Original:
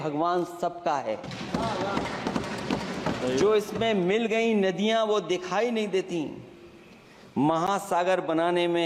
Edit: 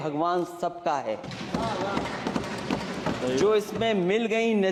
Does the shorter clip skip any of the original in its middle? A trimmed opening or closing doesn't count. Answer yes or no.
no